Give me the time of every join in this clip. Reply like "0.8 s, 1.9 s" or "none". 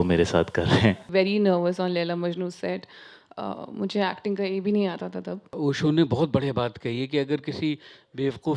1.1 s, 5.5 s